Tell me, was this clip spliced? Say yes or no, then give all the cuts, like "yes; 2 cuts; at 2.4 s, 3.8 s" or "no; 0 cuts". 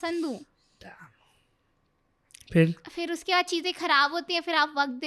no; 0 cuts